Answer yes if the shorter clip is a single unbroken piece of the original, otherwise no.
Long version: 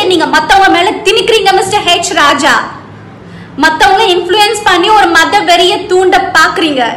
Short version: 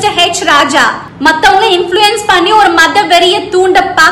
no